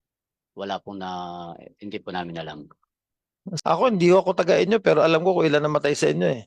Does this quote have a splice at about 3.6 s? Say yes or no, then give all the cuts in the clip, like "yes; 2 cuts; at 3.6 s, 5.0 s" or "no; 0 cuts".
yes; 1 cut; at 3.6 s